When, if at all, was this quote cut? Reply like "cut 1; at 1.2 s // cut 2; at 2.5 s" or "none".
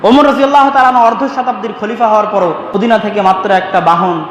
cut 1; at 2.7 s